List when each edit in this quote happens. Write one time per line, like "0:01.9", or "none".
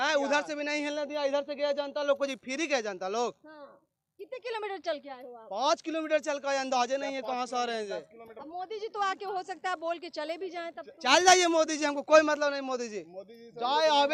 none